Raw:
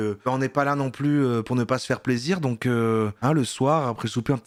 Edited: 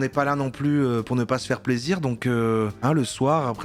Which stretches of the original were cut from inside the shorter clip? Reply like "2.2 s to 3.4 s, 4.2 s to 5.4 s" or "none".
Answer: none